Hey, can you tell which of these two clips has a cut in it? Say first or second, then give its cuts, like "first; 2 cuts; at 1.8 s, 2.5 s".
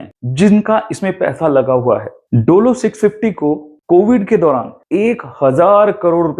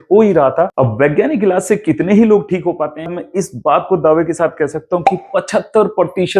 second; 1 cut; at 3.2 s